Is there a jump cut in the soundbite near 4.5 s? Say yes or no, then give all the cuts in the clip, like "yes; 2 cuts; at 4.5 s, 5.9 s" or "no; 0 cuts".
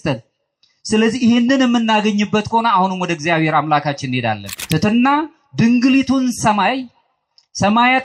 yes; 1 cut; at 4.5 s